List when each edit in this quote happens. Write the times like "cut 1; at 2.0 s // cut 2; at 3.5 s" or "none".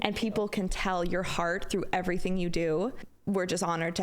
cut 1; at 3.1 s

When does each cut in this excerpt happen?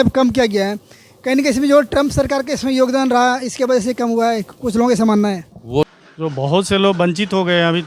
cut 1; at 5.9 s

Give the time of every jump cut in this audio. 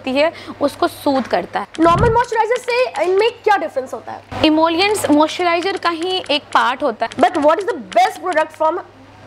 cut 1; at 1.6 s // cut 2; at 7.0 s

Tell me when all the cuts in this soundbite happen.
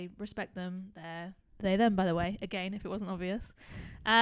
none

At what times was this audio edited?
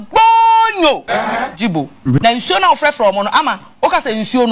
cut 1; at 2.2 s

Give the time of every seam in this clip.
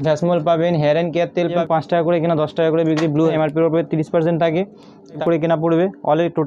cut 1; at 1.6 s // cut 2; at 3.3 s // cut 3; at 5.2 s

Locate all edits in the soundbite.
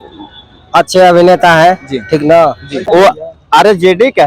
cut 1; at 2.9 s

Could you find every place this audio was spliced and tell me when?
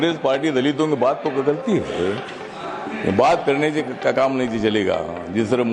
none

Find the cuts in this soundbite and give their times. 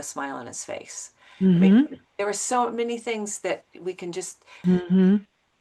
cut 1; at 4.5 s

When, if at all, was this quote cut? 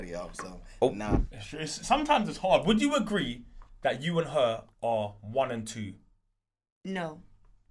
cut 1; at 1.3 s

